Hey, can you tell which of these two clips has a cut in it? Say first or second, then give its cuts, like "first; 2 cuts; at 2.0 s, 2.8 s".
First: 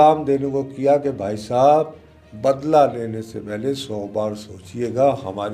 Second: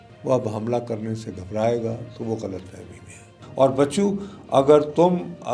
second; 1 cut; at 3.4 s